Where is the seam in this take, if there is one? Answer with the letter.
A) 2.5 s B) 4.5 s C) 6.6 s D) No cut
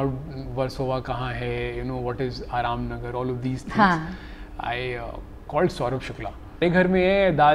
C